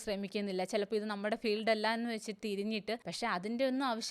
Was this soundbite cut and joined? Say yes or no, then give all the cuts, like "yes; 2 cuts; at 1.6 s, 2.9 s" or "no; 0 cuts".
yes; 1 cut; at 3.1 s